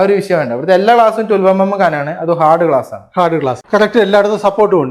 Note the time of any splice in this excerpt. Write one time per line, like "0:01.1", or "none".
0:03.6